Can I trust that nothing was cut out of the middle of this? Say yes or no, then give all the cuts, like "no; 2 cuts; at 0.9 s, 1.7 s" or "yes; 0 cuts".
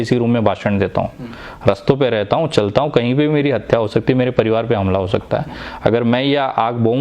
yes; 0 cuts